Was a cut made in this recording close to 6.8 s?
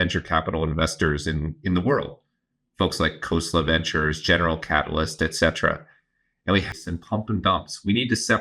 yes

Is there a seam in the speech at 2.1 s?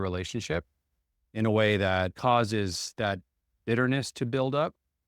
yes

